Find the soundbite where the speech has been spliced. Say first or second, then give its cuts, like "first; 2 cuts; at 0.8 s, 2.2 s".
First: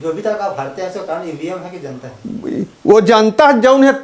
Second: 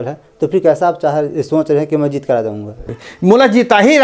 second; 1 cut; at 2.8 s